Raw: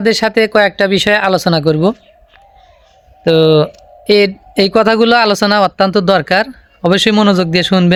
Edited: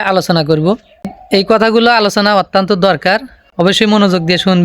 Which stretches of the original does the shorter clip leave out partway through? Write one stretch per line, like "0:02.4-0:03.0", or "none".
0:02.3-0:04.4